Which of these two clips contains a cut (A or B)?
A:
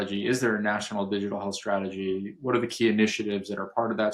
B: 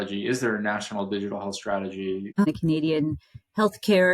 B